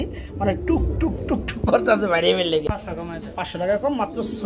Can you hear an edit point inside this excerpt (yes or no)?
yes